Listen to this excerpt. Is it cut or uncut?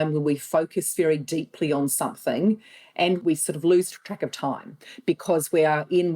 cut